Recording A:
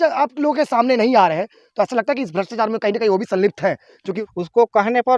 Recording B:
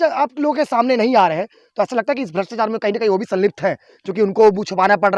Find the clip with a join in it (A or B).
A